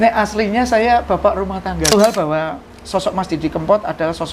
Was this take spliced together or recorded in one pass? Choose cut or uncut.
cut